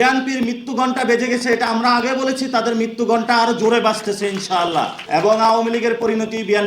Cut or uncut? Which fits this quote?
cut